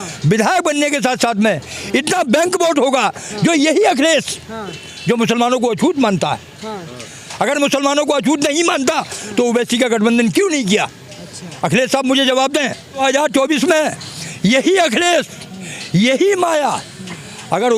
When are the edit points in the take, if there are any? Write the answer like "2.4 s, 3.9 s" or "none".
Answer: 13.0 s